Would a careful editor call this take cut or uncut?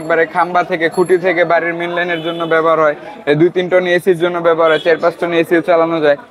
uncut